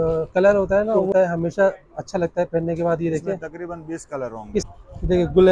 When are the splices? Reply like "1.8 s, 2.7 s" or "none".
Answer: 1.1 s, 4.6 s